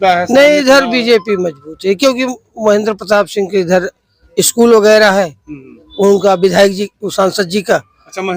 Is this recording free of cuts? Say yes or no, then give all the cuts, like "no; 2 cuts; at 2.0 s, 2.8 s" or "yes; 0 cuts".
yes; 0 cuts